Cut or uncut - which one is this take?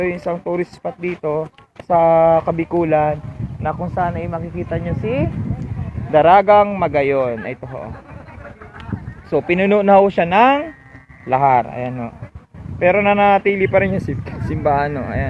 uncut